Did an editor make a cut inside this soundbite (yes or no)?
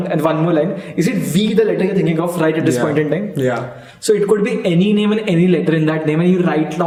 no